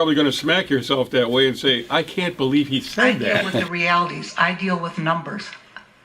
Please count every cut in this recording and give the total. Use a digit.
1